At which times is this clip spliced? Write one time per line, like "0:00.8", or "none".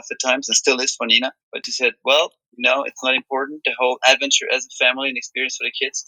none